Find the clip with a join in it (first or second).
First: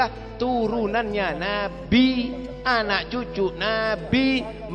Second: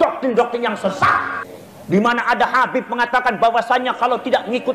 second